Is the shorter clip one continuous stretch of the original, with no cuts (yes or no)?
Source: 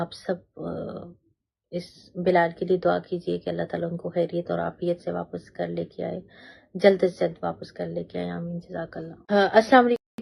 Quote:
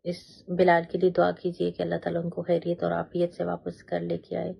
yes